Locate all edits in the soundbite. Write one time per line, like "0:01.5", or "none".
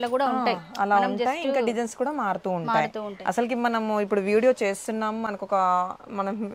none